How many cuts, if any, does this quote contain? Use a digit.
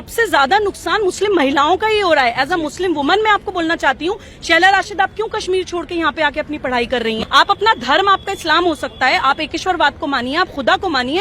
1